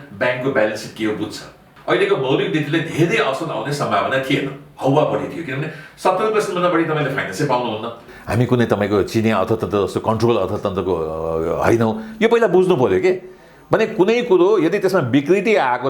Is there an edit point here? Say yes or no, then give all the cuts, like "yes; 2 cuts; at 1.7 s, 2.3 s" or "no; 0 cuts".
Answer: yes; 2 cuts; at 1.7 s, 8.1 s